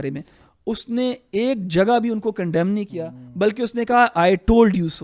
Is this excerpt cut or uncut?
uncut